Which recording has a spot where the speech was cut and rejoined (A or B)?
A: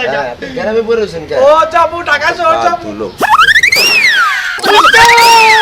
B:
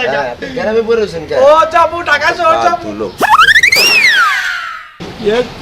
A